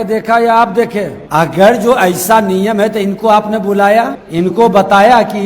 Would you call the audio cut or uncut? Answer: cut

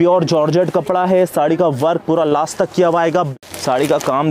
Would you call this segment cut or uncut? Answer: cut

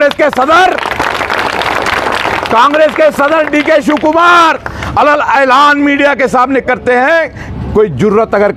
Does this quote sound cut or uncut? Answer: uncut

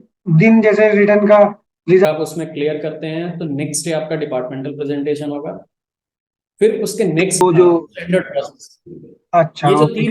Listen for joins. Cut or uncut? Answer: cut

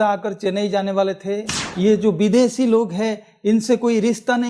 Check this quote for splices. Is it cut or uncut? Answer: cut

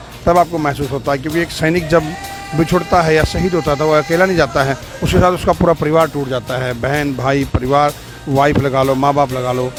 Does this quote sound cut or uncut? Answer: uncut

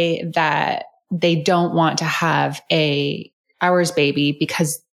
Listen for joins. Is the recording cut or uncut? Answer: uncut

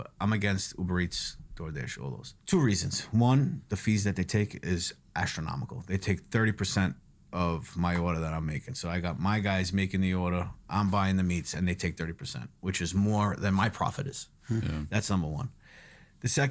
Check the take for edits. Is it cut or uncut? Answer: cut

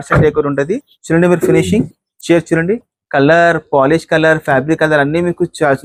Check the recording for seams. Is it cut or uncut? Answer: uncut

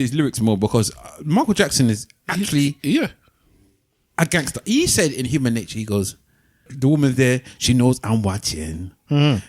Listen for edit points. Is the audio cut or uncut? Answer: cut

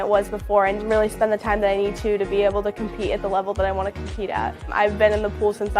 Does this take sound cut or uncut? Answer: uncut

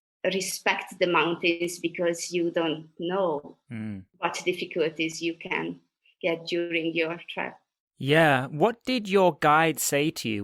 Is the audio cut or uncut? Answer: cut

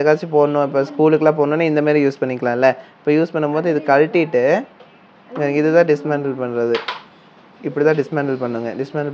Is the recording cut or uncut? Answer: uncut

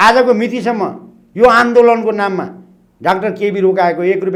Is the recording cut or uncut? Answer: uncut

